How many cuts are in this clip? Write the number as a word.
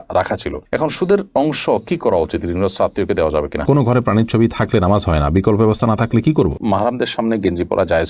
two